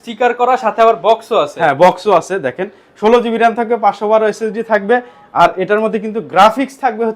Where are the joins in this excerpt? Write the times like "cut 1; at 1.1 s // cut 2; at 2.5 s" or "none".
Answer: none